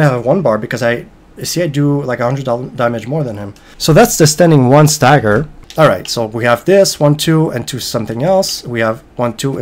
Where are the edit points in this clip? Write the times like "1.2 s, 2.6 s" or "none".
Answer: 5.6 s